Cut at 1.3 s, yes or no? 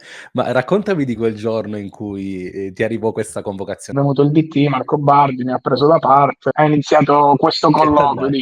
no